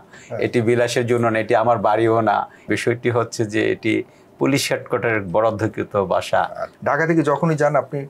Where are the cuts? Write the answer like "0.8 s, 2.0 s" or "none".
2.7 s, 6.7 s